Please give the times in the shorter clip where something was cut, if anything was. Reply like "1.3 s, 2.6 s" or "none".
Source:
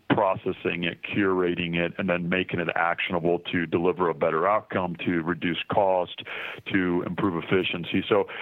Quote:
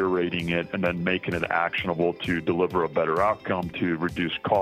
none

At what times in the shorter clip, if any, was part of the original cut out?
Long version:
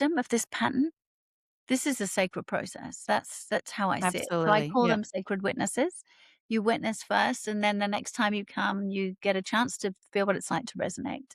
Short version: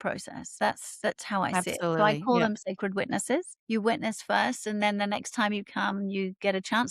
3.5 s

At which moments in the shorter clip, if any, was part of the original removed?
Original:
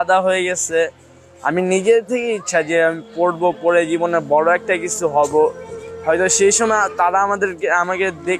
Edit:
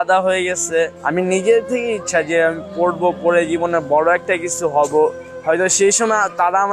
1.0 s, 5.3 s

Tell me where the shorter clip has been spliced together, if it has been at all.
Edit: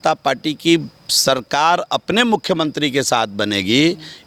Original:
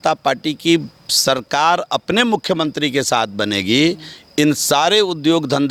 none

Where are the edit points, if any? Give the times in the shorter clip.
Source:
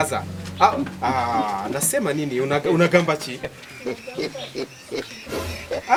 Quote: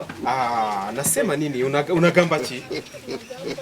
2.5 s

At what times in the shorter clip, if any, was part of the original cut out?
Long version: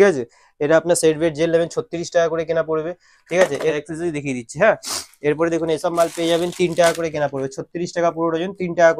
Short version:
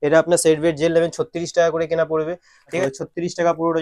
2.8 s

